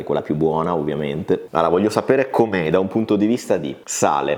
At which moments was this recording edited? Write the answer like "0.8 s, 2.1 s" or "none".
none